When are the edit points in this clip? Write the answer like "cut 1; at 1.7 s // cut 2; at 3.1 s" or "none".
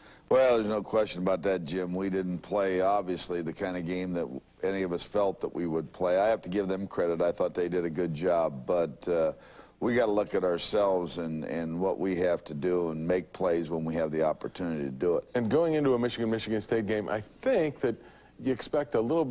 cut 1; at 2.3 s

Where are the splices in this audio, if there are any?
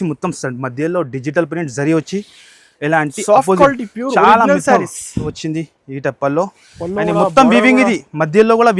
cut 1; at 5.4 s

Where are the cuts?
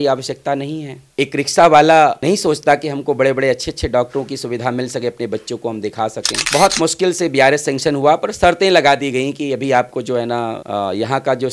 cut 1; at 6.5 s

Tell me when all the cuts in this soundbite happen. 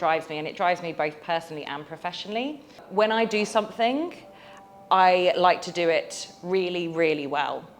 cut 1; at 2.8 s

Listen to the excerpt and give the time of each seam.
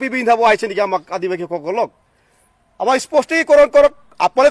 none

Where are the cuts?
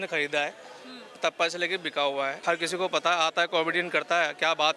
cut 1; at 2.4 s

